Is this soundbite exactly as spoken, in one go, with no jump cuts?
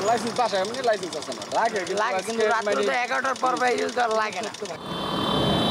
no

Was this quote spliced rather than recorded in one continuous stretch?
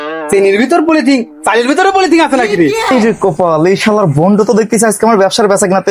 no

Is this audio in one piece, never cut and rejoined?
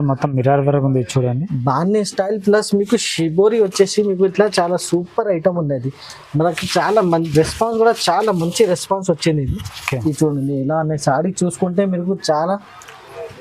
yes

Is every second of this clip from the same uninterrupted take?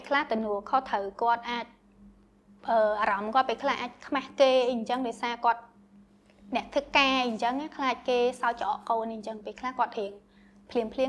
yes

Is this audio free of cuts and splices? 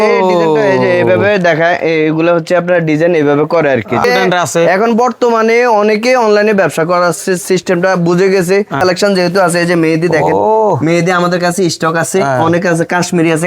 no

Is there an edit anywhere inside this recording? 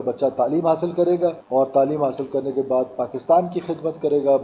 no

